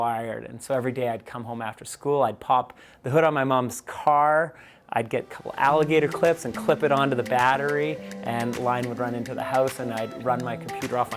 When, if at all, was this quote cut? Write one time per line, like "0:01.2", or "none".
none

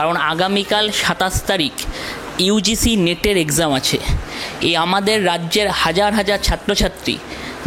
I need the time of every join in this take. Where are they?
none

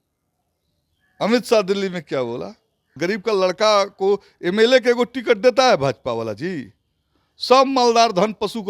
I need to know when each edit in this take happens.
0:03.0

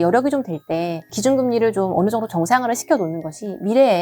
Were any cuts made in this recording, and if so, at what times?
0:01.1

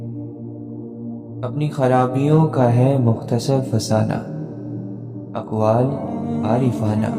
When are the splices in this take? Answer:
0:01.4

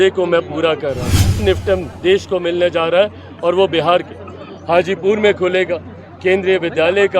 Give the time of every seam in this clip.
0:01.4

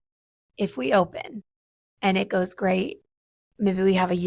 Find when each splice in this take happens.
none

